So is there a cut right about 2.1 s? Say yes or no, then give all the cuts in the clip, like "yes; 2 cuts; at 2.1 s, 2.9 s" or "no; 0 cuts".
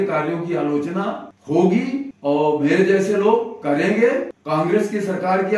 yes; 3 cuts; at 1.3 s, 2.1 s, 4.3 s